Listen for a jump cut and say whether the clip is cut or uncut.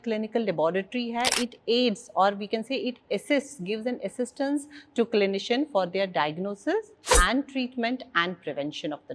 uncut